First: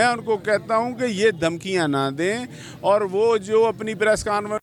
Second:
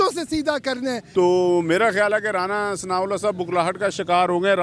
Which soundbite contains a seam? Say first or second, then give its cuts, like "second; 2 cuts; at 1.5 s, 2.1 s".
second; 1 cut; at 1.0 s